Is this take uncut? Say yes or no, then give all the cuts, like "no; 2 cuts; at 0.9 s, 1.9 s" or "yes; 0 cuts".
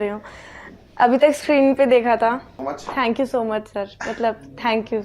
no; 1 cut; at 2.5 s